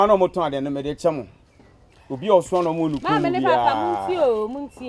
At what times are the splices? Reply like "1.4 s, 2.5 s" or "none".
none